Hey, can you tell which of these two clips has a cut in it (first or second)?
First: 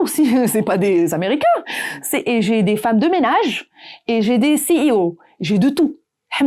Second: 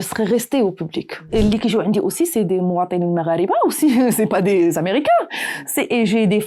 second